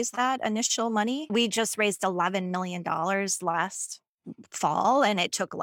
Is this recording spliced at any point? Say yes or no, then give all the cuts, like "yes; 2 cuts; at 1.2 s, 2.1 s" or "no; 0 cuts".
no; 0 cuts